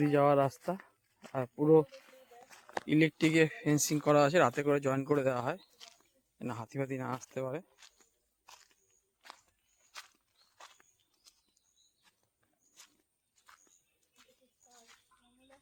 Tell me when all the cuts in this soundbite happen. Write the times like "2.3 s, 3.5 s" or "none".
none